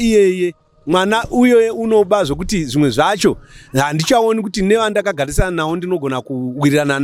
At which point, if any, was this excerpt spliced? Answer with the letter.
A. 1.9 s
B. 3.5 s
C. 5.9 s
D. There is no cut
D